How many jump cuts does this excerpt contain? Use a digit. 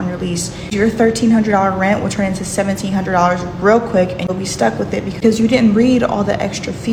0